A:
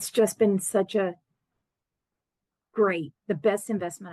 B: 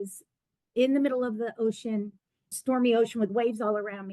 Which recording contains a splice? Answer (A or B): B